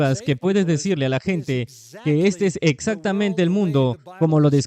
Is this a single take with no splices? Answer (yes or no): yes